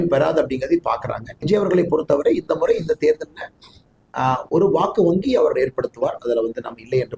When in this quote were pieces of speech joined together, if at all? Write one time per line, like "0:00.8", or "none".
0:01.4